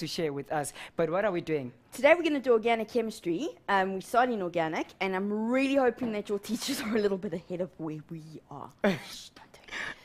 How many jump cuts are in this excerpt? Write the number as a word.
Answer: zero